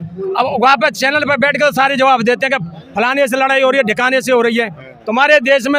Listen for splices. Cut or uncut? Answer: uncut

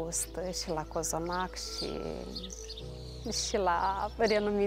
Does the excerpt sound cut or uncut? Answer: uncut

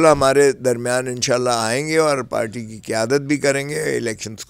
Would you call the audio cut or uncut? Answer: uncut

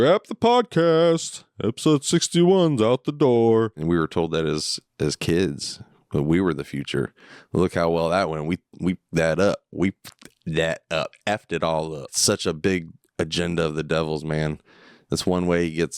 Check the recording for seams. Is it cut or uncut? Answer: cut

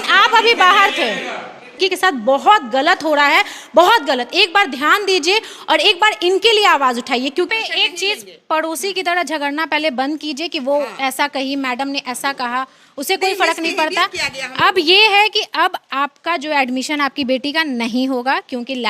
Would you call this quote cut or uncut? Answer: cut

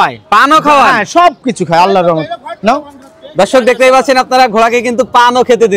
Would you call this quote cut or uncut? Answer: uncut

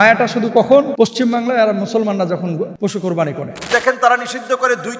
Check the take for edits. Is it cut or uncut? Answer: cut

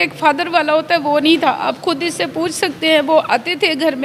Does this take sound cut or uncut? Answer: uncut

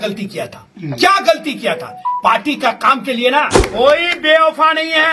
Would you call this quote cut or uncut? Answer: cut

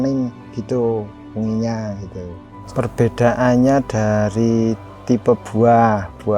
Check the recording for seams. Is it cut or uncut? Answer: cut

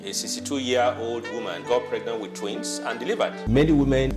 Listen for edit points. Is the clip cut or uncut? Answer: uncut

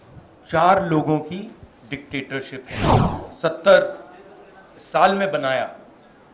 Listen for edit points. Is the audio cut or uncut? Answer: cut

